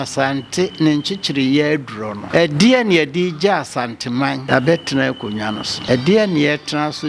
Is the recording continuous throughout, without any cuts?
no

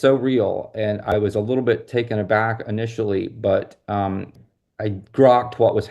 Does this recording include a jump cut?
yes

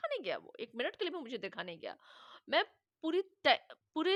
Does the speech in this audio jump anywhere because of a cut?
no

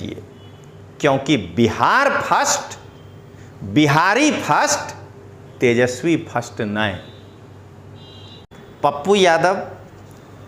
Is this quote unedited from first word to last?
no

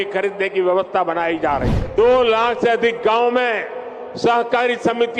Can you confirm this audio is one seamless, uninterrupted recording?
no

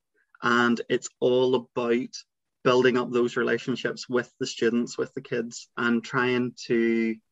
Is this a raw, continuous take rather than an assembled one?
no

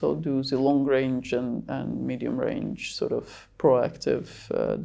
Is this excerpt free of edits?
yes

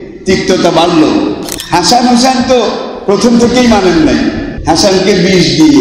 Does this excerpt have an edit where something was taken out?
yes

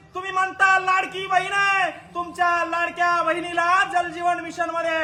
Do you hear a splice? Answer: no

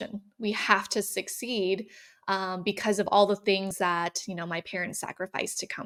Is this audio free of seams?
yes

